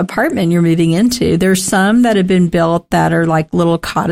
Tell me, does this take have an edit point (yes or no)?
no